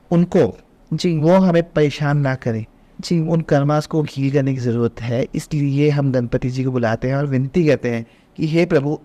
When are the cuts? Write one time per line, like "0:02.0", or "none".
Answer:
none